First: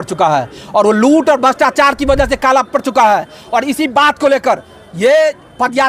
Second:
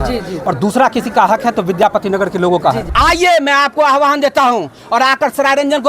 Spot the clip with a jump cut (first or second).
second